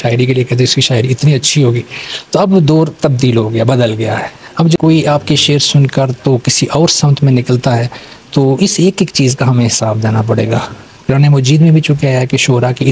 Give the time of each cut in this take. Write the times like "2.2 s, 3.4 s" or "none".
4.8 s